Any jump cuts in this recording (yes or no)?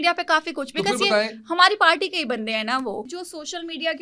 yes